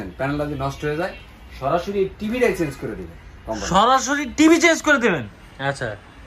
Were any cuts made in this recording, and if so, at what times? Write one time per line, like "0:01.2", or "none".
0:05.3